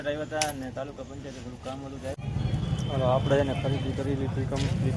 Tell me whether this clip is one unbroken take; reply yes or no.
no